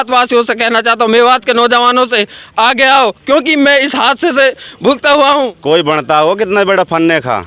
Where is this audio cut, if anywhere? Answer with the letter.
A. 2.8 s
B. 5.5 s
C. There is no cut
B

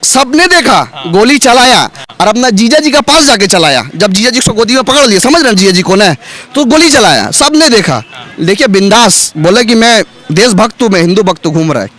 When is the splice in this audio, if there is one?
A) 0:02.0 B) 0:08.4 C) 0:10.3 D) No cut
D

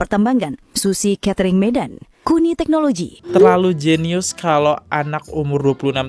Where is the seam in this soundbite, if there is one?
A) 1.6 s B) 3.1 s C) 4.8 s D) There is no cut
B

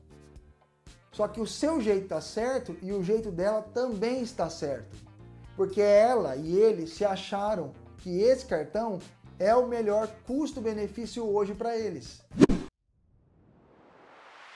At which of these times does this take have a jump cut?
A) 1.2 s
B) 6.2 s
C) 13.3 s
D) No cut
A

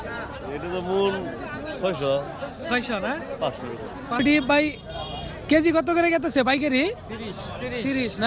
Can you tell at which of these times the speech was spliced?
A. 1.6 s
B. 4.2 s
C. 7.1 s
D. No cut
B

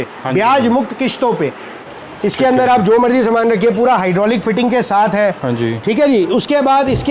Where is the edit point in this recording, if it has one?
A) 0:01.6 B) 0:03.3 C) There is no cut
A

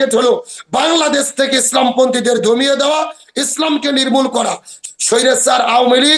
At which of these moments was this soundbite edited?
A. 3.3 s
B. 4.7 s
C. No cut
B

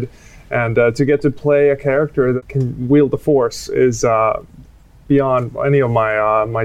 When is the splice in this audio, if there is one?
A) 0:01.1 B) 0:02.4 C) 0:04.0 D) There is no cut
B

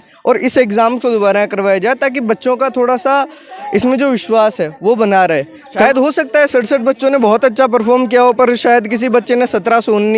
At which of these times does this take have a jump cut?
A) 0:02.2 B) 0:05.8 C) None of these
B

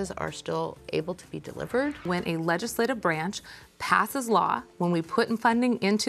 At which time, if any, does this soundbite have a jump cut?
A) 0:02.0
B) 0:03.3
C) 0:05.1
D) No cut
A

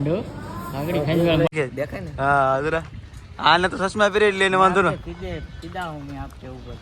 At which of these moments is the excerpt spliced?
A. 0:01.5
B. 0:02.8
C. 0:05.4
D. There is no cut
A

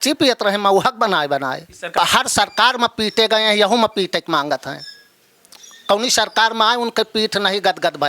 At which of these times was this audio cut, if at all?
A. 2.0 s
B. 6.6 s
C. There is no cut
A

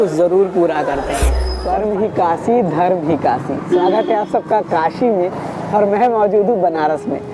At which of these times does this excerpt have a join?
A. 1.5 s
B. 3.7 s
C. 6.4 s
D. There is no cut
A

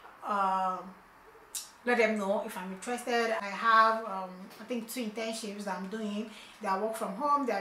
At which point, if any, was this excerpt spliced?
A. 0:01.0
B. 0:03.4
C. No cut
B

